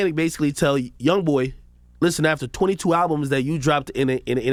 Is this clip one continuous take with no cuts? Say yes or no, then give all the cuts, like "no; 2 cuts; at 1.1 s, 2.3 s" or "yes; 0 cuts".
yes; 0 cuts